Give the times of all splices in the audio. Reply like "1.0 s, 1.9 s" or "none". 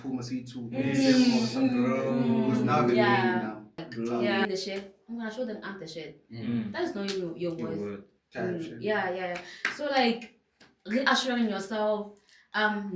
4.4 s